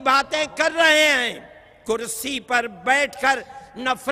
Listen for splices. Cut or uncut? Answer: uncut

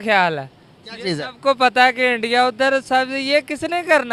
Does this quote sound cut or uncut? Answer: uncut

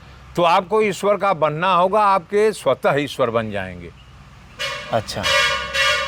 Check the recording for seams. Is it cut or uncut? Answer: uncut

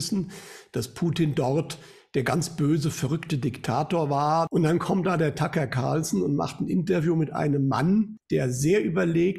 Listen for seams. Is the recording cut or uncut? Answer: cut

